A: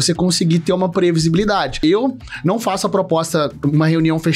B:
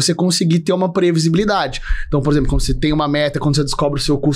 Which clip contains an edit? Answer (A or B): A